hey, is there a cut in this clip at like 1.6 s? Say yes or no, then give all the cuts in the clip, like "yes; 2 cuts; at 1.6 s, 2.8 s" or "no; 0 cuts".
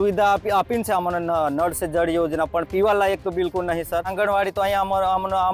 no; 1 cut; at 4.1 s